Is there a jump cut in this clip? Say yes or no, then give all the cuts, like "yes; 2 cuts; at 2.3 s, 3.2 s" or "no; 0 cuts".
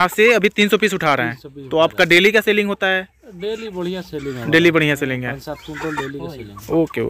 no; 0 cuts